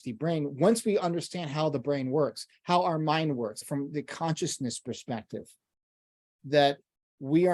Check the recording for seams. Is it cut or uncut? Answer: cut